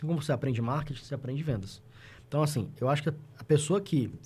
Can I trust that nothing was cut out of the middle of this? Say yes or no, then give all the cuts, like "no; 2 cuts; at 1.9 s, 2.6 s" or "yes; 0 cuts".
yes; 0 cuts